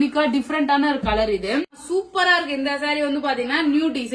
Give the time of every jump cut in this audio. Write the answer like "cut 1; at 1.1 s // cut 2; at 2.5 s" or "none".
cut 1; at 1.8 s